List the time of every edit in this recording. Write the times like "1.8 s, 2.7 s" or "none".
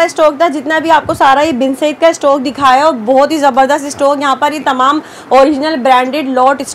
none